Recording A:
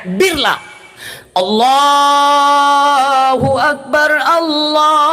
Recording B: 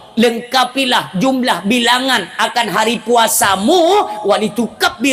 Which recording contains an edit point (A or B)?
A